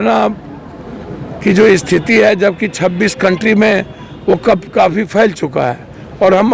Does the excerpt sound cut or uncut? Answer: uncut